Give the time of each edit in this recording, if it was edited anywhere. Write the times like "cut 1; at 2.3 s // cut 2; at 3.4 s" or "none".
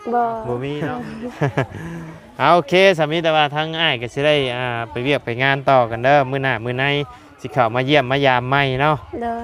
cut 1; at 0.9 s